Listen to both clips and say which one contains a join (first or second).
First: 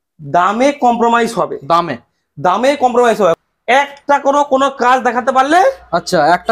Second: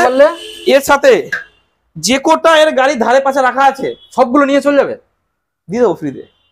first